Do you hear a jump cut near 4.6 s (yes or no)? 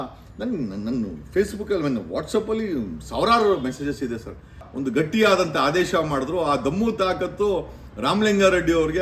yes